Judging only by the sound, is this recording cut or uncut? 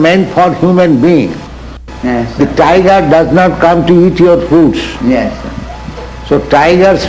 cut